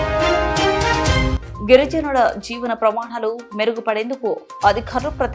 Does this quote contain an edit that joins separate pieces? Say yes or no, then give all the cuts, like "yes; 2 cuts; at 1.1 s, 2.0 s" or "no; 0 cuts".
yes; 1 cut; at 1.3 s